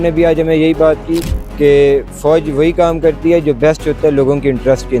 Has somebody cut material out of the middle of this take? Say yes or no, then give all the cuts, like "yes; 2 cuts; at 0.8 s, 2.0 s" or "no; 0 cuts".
no; 0 cuts